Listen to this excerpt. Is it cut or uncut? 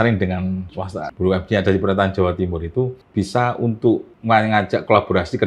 cut